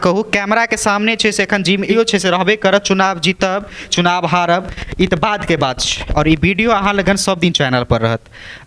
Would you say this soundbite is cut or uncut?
cut